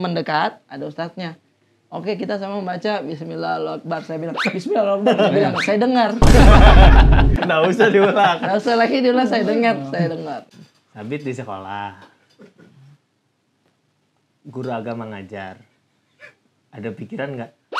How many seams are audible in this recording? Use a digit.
1